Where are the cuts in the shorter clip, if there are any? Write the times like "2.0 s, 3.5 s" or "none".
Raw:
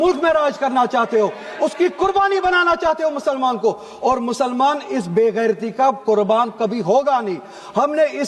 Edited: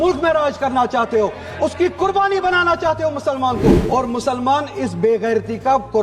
3.8 s